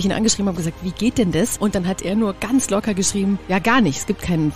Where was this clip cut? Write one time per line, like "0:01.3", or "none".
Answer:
0:02.1
0:03.4